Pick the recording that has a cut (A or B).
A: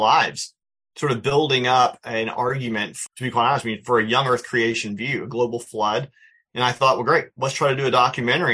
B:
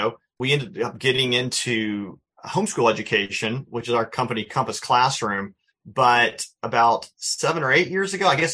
A